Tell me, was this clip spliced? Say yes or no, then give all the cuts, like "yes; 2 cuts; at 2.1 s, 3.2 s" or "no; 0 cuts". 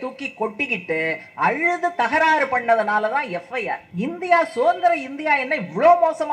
yes; 1 cut; at 3.9 s